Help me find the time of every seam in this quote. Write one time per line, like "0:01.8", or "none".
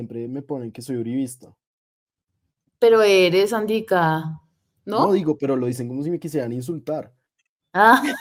none